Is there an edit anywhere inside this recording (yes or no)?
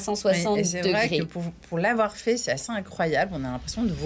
no